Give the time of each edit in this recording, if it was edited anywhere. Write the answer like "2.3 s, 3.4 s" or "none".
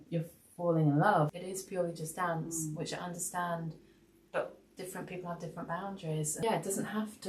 1.3 s, 6.4 s